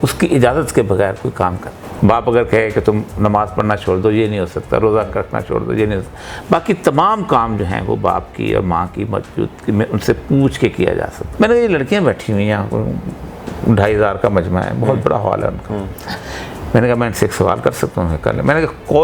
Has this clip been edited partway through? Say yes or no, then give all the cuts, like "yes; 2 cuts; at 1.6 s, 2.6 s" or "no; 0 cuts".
yes; 2 cuts; at 1.7 s, 11.2 s